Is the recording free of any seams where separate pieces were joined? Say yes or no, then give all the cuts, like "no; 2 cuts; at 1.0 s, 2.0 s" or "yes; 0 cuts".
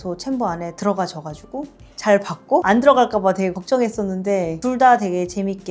no; 1 cut; at 4.5 s